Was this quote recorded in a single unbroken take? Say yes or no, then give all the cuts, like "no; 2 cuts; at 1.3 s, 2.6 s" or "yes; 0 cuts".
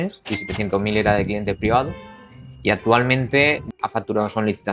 no; 1 cut; at 3.8 s